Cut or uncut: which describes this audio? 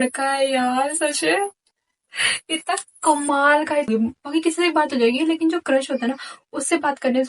cut